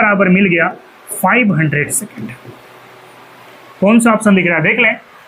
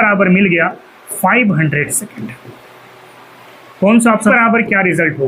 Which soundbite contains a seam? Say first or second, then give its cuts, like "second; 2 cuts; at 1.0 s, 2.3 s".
second; 1 cut; at 4.3 s